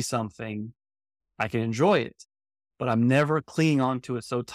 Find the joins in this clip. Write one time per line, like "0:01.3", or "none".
none